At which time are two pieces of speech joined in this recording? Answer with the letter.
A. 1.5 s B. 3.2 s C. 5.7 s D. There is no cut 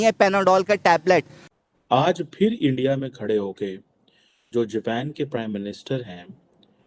D